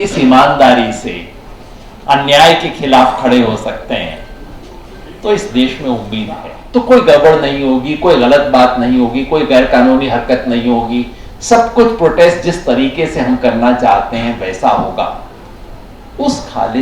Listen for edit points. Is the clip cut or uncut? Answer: cut